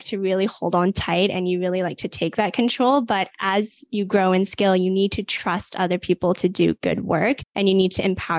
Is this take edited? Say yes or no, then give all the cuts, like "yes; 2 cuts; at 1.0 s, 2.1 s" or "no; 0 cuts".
yes; 1 cut; at 7.5 s